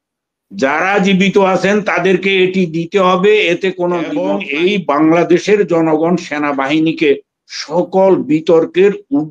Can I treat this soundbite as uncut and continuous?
no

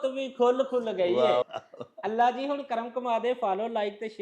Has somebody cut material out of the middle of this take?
yes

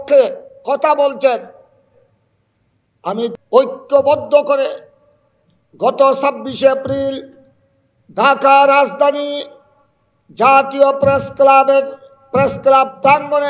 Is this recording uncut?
no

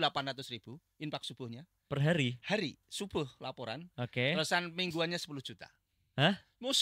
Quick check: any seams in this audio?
no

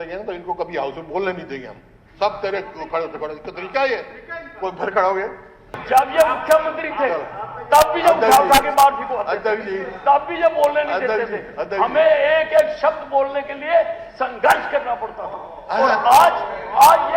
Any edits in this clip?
yes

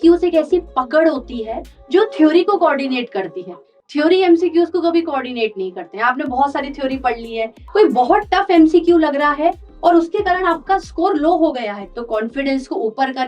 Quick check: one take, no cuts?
no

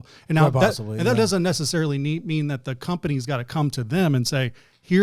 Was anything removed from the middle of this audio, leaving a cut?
no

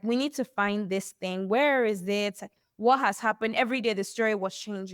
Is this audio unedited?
yes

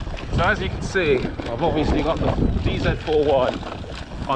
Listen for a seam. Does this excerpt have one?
no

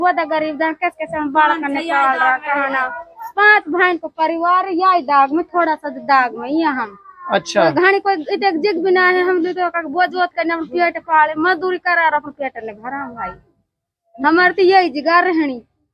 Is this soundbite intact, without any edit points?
yes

